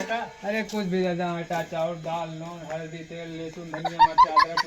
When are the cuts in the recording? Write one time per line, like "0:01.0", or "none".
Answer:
0:03.8